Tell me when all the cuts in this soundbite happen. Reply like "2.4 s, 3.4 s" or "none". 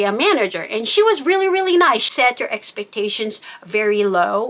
2.1 s